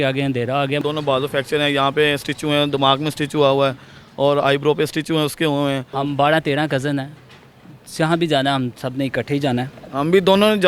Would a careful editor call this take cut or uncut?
cut